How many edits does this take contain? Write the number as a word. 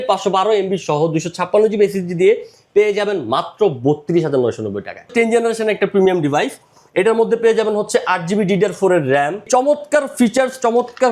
two